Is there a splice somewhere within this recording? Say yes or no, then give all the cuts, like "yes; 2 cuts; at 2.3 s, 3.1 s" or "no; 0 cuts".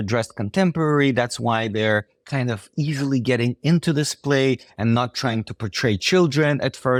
no; 0 cuts